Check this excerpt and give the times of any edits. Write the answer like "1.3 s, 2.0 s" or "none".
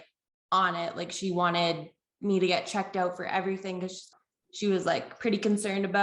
4.1 s

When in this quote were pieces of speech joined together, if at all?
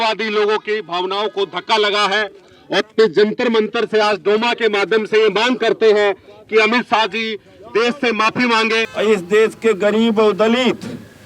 8.9 s

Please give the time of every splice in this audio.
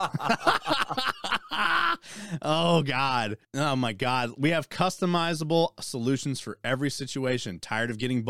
3.4 s

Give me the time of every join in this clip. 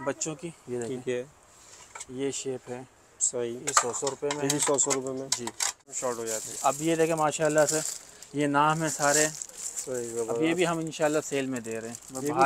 5.9 s

